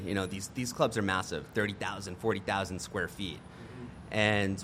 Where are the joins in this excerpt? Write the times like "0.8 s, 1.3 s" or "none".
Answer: none